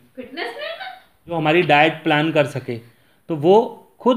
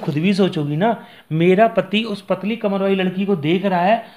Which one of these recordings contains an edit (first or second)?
first